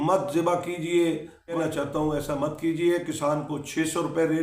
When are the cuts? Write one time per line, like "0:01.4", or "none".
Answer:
0:01.6